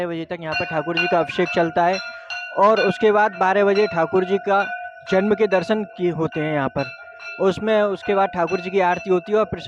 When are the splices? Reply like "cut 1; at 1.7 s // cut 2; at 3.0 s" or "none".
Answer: none